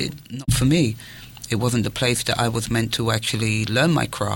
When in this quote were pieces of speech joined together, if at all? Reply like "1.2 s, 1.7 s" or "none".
none